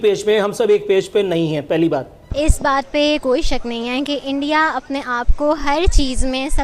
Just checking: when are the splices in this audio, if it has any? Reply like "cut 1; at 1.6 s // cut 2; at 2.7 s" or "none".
cut 1; at 2.2 s